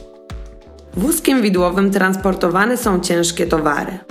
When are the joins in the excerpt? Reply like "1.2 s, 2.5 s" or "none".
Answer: 0.9 s